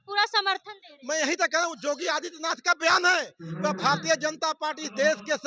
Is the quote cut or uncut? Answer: uncut